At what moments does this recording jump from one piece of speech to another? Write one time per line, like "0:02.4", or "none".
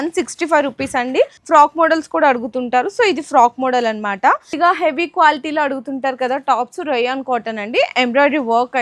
0:01.4
0:04.5